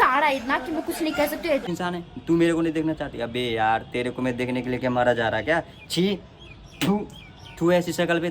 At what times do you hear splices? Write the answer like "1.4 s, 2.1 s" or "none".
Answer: 1.7 s